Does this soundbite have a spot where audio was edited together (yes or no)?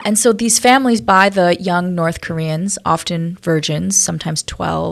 no